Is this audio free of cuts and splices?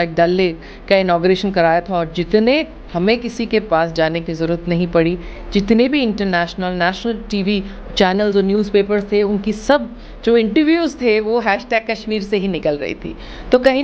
yes; 0 cuts

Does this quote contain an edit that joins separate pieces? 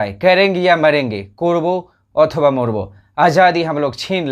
no; 0 cuts

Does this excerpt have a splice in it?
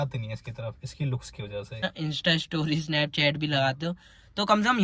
yes; 1 cut; at 1.9 s

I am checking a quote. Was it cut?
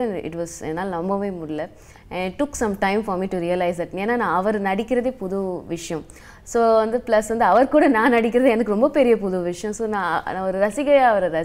no; 0 cuts

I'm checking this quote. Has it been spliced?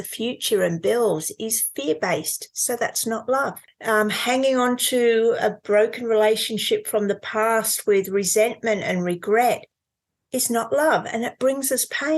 yes; 1 cut; at 3.7 s

